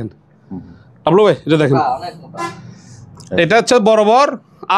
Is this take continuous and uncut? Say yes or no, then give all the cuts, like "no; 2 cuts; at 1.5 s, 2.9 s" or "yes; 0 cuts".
yes; 0 cuts